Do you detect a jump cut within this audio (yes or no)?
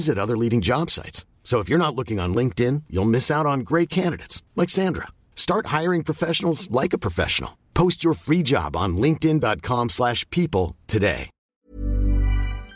yes